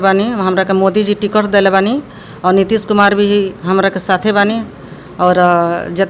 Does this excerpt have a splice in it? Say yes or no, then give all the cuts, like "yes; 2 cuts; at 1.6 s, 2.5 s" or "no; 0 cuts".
no; 0 cuts